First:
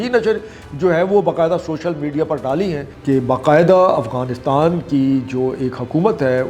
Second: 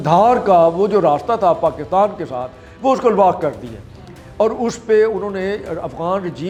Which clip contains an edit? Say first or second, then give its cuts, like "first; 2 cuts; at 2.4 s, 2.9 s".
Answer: first; 1 cut; at 2.9 s